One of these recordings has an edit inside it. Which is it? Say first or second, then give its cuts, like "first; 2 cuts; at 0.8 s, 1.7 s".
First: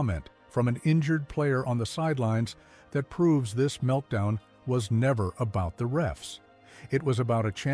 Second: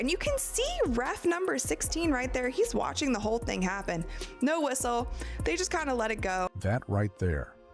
second; 1 cut; at 6.6 s